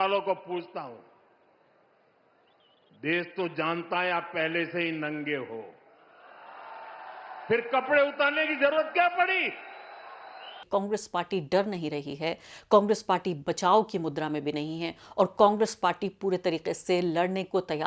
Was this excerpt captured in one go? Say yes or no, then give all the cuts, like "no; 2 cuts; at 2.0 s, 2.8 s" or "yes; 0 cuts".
no; 1 cut; at 10.6 s